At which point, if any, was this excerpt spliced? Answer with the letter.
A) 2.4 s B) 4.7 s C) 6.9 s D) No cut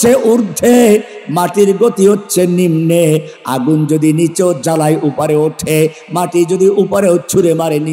D